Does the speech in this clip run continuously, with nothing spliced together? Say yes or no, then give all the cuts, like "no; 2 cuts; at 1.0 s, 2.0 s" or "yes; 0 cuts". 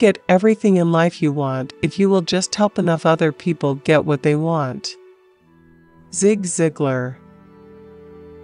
yes; 0 cuts